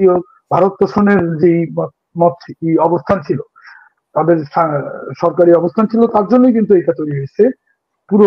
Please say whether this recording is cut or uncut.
uncut